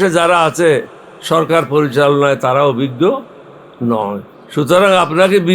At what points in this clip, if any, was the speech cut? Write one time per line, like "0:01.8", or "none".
0:04.4